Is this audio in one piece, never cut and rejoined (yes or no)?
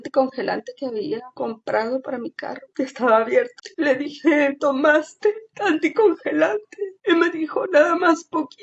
yes